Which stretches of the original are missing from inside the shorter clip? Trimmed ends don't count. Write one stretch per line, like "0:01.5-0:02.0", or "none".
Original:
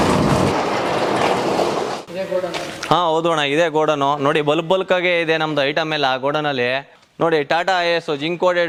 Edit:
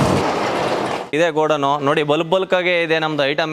0:01.3-0:03.4

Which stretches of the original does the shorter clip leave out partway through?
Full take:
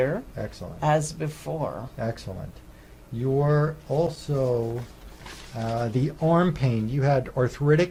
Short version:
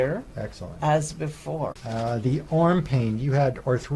0:01.8-0:05.5

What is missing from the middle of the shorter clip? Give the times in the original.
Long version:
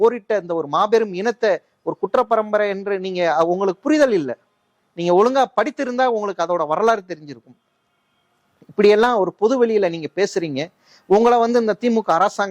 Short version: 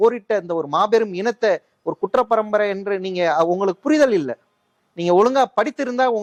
none

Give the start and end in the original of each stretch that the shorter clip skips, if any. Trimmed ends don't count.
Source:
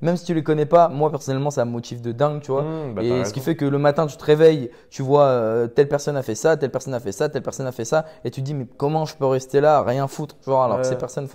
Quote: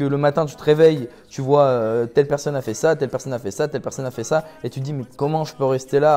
none

